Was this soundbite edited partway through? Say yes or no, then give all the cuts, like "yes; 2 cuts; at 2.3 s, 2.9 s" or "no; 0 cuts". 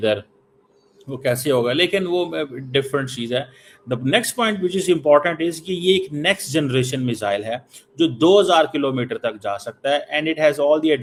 no; 0 cuts